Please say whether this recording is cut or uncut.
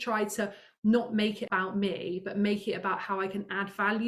cut